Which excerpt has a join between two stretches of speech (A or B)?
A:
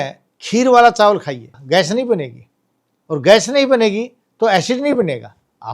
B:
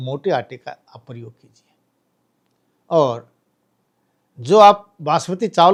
A